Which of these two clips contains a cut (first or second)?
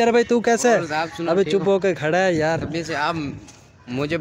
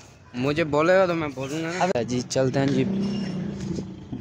second